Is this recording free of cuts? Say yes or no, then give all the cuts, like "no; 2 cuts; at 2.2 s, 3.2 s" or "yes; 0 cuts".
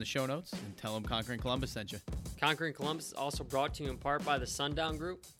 no; 1 cut; at 2.3 s